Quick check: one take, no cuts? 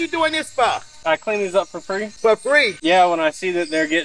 no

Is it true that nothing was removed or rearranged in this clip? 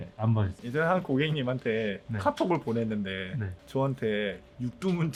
yes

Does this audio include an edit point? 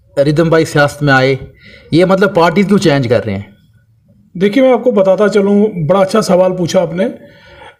no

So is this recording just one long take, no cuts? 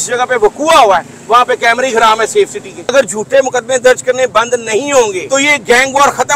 no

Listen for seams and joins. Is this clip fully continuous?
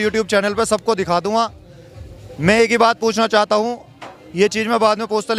yes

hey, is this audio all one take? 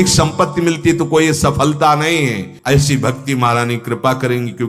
no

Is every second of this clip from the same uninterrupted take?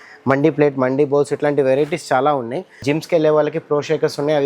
no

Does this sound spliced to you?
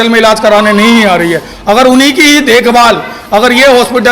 no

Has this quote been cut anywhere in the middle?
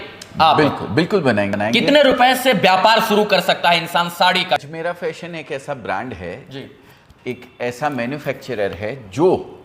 yes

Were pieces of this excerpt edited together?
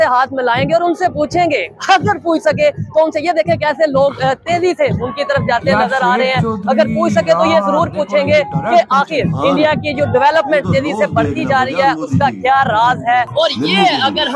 yes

